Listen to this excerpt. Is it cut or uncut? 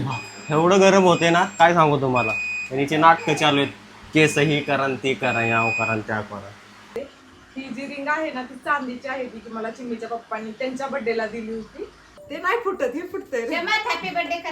cut